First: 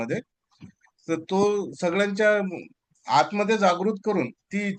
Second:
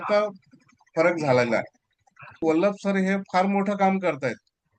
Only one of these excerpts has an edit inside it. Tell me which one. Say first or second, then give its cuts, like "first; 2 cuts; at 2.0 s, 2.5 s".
second; 1 cut; at 2.4 s